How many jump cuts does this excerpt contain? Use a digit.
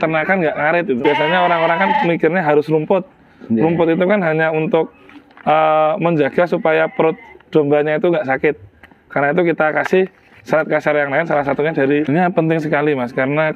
2